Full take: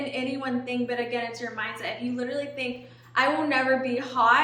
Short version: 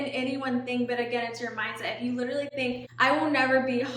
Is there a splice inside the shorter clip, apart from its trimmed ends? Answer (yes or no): yes